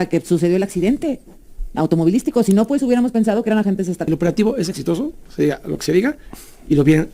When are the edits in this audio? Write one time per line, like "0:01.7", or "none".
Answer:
0:04.0